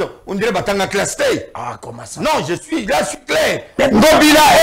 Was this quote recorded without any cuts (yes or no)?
no